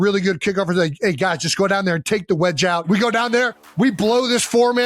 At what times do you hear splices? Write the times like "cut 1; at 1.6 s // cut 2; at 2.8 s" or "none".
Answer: cut 1; at 2.8 s